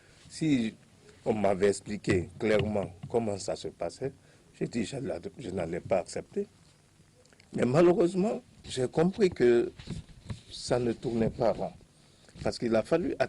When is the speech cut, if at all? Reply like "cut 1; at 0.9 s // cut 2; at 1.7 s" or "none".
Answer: cut 1; at 8.7 s